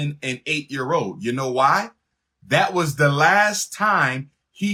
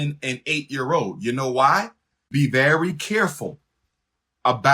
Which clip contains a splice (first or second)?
second